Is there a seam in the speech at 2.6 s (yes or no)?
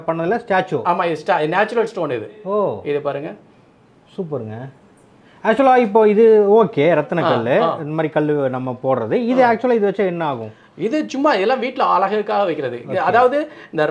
no